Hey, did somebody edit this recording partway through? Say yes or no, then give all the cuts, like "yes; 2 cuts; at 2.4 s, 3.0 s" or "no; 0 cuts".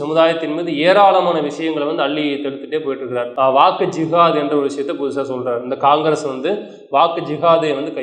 yes; 1 cut; at 3.3 s